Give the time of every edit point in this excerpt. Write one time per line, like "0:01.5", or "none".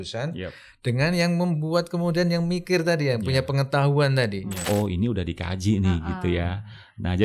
0:04.6